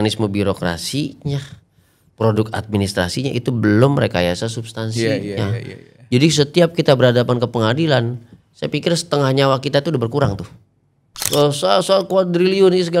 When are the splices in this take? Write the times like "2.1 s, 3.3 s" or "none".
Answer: 11.3 s